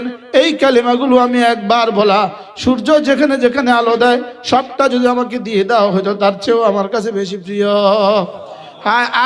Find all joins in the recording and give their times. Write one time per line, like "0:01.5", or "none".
none